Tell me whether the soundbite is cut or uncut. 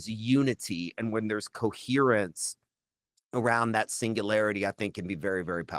uncut